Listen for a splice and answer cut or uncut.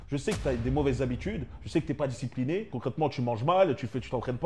cut